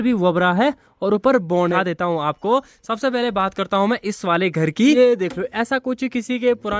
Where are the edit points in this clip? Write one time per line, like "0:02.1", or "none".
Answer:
0:01.8
0:05.0

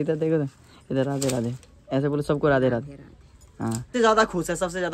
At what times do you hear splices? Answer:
0:03.9

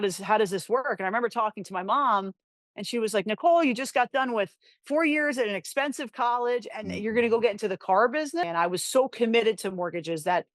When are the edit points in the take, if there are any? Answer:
0:08.5

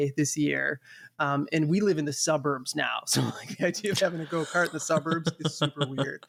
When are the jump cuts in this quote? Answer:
none

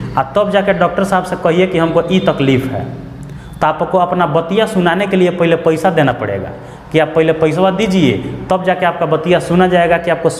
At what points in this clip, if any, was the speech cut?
none

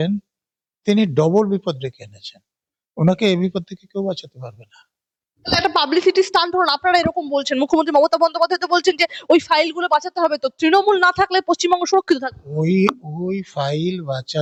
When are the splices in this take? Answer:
none

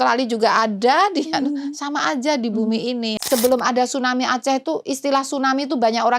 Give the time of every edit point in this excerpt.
0:03.2

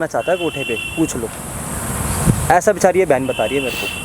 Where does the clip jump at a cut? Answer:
none

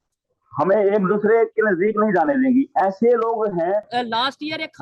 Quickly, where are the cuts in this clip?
0:03.9

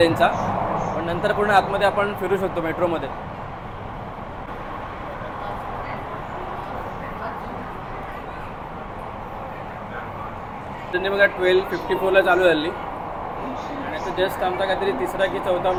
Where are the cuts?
none

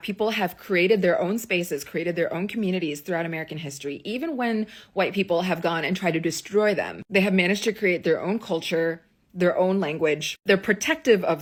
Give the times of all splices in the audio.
none

